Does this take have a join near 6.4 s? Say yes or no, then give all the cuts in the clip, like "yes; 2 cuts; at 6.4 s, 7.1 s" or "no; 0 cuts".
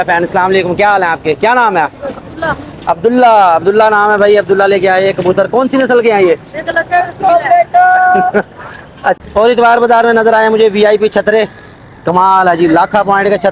no; 1 cut; at 9.2 s